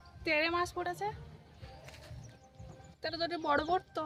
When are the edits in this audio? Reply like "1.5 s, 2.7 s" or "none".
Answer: none